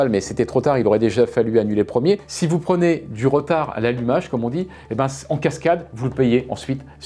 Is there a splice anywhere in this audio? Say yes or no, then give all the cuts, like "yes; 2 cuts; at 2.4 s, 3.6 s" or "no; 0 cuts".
no; 0 cuts